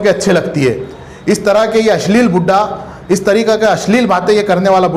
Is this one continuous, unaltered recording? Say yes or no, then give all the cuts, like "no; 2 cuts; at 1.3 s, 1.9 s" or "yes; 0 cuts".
yes; 0 cuts